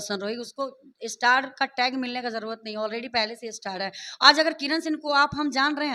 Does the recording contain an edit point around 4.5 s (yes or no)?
no